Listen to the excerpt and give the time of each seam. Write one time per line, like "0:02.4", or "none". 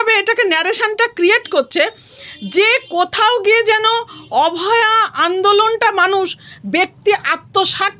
none